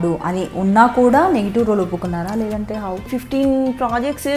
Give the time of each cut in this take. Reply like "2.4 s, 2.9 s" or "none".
3.0 s